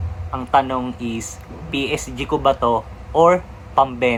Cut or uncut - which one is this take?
uncut